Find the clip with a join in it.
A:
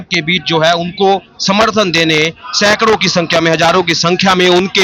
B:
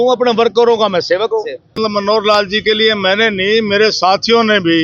B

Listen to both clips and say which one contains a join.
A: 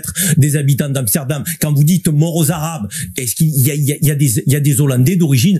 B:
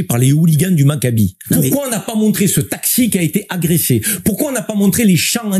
B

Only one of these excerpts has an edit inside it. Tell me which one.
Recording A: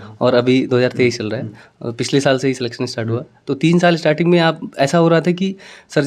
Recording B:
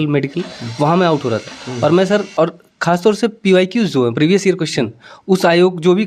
B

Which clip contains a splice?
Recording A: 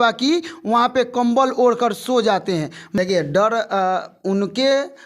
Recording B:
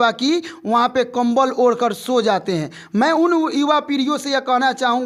A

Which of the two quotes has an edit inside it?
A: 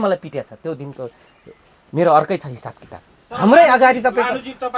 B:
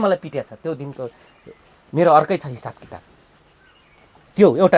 A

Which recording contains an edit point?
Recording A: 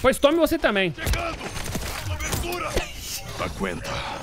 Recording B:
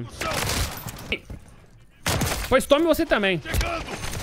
B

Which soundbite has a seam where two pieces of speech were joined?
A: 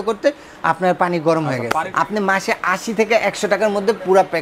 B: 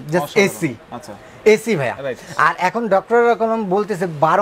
A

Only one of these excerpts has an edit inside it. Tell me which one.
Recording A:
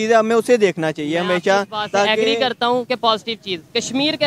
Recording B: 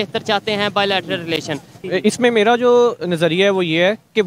B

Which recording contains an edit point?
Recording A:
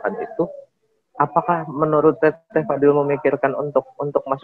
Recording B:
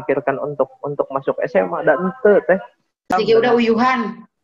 B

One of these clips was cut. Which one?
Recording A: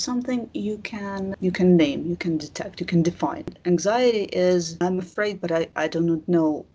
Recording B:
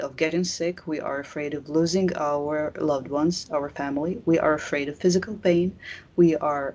A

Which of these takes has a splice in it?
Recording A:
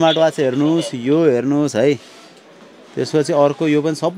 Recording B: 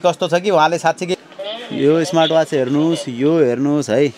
B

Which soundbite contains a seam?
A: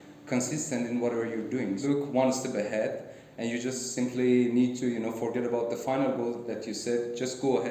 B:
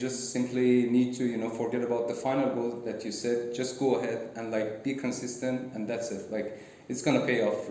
A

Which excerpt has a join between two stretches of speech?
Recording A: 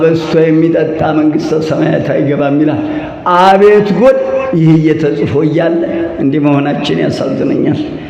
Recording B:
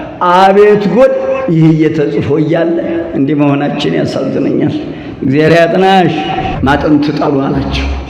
B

